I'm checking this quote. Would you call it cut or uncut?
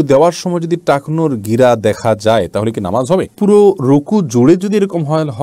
uncut